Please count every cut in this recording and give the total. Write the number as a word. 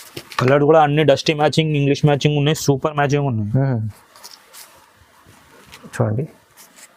zero